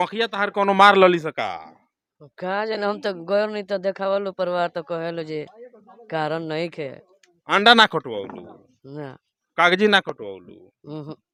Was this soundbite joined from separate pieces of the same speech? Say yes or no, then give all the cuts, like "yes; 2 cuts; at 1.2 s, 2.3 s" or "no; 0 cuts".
no; 0 cuts